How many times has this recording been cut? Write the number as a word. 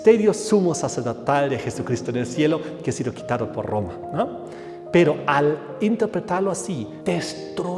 one